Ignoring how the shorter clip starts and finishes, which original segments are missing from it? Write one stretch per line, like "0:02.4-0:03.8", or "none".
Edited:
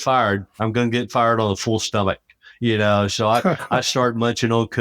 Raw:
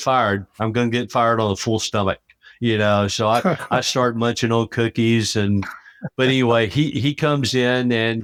none